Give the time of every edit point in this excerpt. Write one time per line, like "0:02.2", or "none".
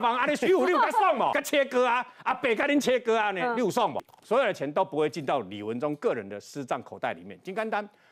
0:01.4
0:04.0